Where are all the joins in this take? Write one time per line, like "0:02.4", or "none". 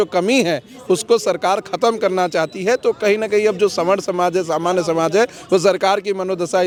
none